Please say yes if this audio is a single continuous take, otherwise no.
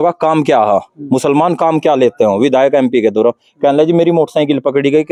yes